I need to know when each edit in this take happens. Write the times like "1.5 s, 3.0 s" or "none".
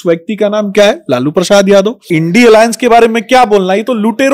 2.1 s